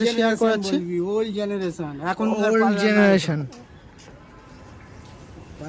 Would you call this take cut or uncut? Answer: uncut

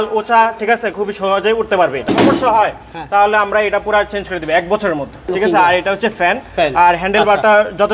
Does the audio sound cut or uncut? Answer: cut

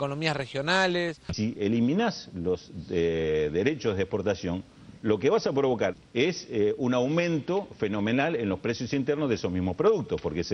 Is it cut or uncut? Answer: cut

